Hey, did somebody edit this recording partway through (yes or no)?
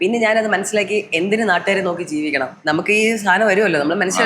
yes